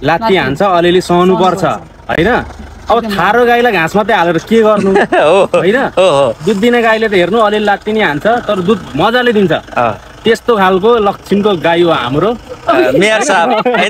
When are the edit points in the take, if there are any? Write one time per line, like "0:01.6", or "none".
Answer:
none